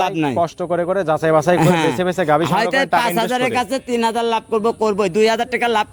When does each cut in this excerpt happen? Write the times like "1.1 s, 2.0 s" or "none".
none